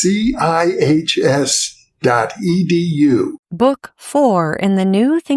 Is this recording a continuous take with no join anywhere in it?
no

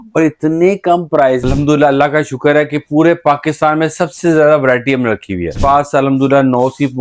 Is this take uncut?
no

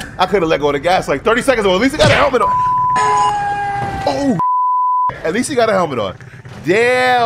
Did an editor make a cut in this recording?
no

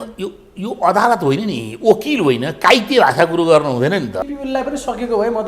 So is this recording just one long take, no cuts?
no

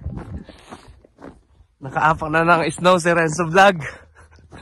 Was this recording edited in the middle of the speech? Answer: no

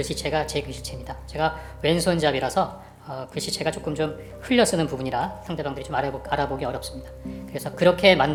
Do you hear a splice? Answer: no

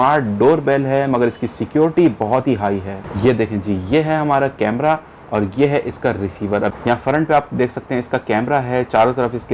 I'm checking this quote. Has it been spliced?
yes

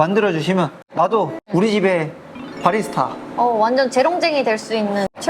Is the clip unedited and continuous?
no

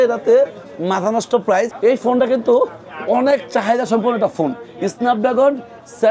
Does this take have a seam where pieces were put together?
yes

